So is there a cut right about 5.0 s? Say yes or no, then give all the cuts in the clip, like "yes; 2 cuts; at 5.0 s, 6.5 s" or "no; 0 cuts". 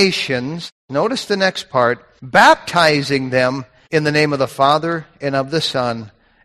no; 3 cuts; at 0.7 s, 2.1 s, 3.7 s